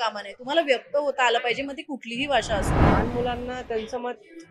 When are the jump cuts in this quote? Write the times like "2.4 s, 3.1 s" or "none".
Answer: 2.7 s